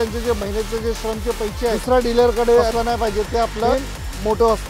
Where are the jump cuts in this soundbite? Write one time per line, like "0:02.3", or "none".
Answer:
0:01.8
0:02.7
0:03.7